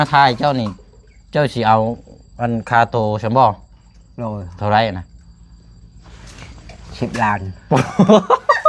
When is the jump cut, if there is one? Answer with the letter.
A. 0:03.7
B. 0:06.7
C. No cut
C